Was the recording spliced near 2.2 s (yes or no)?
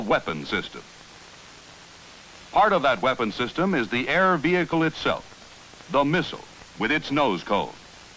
no